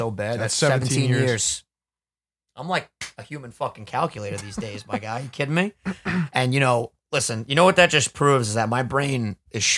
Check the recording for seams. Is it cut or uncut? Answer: uncut